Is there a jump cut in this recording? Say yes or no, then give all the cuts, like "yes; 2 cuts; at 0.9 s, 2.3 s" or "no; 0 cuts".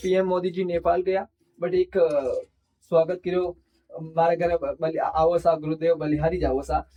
no; 0 cuts